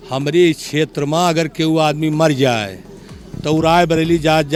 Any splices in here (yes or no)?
no